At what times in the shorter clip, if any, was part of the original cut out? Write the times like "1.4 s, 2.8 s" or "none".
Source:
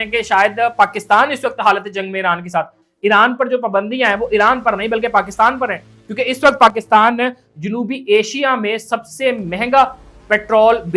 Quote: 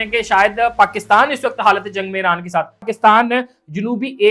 2.9 s